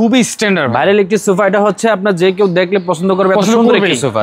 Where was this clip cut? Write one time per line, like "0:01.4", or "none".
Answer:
none

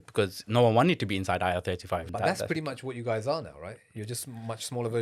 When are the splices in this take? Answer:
0:02.1

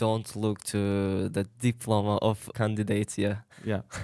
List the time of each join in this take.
0:02.5

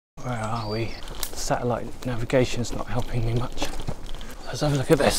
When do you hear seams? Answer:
0:01.0

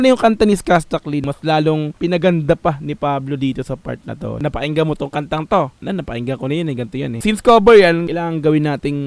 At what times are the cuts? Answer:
0:04.4
0:05.8
0:07.2
0:08.1

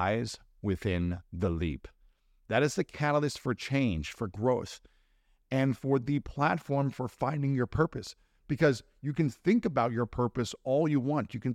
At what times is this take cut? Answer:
none

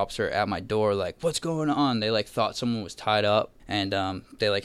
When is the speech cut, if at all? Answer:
0:03.6

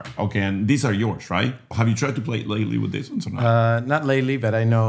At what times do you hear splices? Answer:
0:01.7

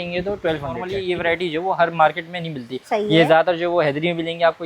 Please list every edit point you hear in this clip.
0:01.0

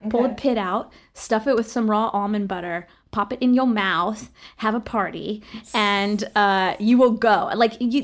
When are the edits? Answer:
none

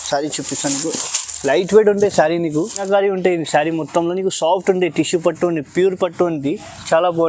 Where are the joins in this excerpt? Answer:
0:02.8

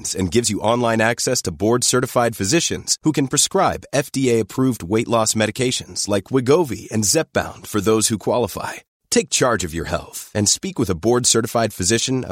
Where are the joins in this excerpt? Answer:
none

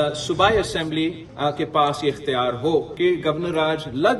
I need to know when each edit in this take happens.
0:01.3
0:02.9

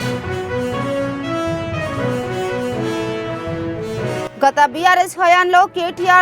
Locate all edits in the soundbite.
0:04.3

